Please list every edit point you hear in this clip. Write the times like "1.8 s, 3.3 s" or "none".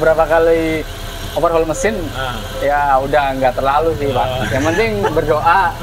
none